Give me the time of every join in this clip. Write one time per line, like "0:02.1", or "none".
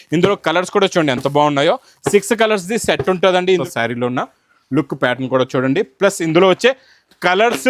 0:03.6